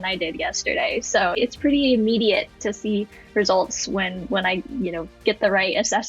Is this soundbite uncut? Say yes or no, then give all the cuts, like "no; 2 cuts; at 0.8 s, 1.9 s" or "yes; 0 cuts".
no; 1 cut; at 1.4 s